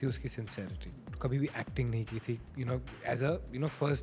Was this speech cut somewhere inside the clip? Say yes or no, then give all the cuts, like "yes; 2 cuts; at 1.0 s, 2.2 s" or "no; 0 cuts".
yes; 1 cut; at 1.1 s